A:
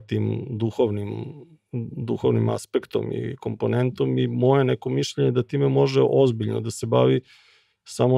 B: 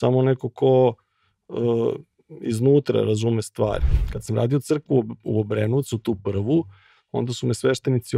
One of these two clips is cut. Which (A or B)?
B